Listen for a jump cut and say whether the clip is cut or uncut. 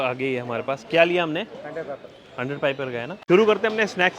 cut